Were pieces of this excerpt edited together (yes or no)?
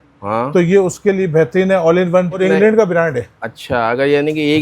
yes